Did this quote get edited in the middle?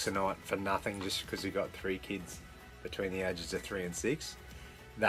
no; 0 cuts

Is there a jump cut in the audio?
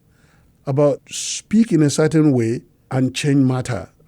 yes; 2 cuts; at 1.0 s, 2.7 s

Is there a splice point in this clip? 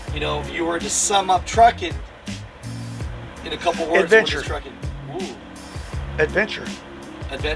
no; 0 cuts

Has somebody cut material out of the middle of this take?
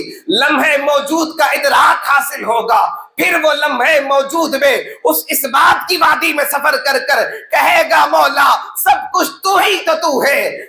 no; 0 cuts

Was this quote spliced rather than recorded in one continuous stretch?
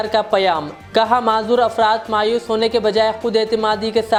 no; 0 cuts

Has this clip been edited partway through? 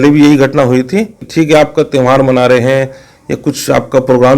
yes; 1 cut; at 1.2 s

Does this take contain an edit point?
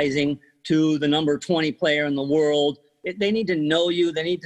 yes; 1 cut; at 2.9 s

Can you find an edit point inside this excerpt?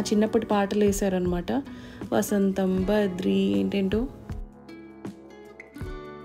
no; 0 cuts

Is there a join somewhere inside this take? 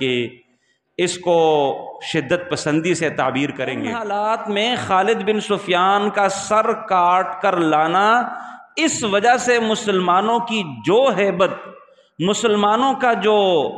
yes; 1 cut; at 4.0 s

